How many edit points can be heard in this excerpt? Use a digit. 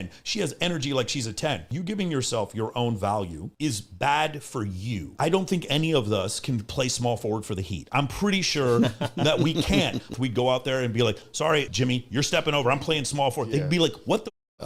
4